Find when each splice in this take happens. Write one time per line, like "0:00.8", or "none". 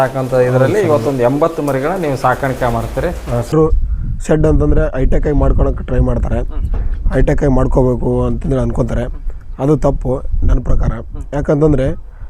0:03.5